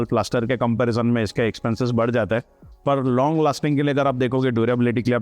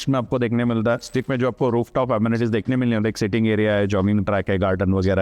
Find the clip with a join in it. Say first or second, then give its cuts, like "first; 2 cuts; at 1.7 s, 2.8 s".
second; 1 cut; at 1.2 s